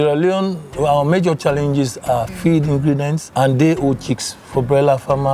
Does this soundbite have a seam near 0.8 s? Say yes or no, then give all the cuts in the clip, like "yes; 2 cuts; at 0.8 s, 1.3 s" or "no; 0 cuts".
yes; 3 cuts; at 0.8 s, 2.3 s, 3.2 s